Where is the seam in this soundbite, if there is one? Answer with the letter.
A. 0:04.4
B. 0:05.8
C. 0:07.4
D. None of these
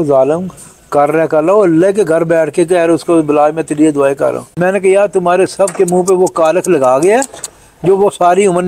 A